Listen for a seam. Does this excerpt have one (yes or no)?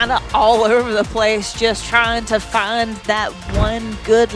no